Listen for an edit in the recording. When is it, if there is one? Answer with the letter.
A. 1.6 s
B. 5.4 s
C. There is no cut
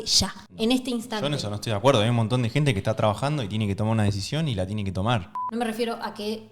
B